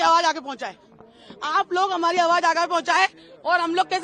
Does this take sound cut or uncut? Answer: uncut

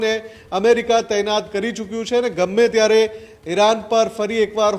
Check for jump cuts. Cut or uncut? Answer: uncut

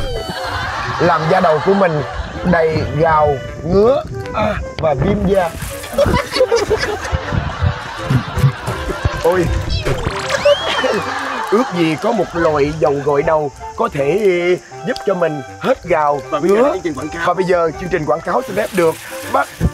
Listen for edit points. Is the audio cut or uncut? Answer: uncut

